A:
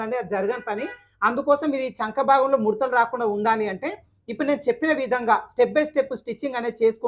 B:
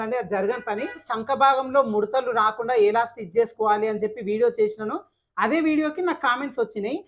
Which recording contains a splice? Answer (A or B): B